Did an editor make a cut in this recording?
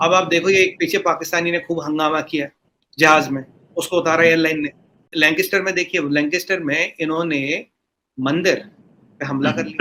no; 0 cuts

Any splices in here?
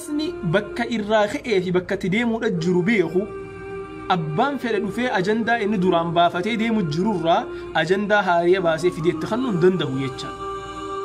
no; 0 cuts

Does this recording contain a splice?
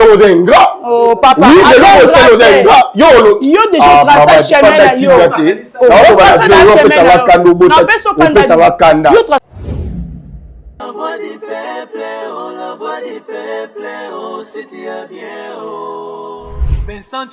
yes; 1 cut; at 9.4 s

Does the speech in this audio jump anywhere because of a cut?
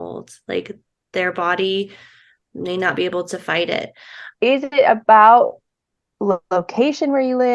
yes; 1 cut; at 4.2 s

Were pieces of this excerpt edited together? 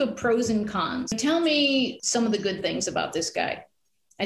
yes; 2 cuts; at 1.1 s, 2.0 s

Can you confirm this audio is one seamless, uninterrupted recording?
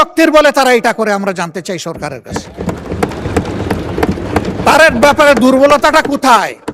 yes; 0 cuts

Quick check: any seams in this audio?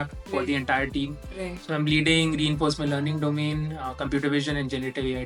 no; 0 cuts

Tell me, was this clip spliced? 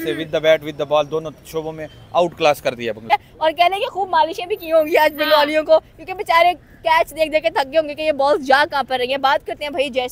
no; 0 cuts

